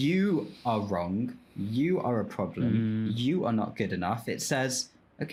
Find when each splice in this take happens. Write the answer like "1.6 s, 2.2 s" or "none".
none